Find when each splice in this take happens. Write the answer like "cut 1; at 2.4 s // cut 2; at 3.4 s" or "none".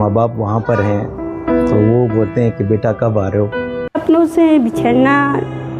cut 1; at 3.9 s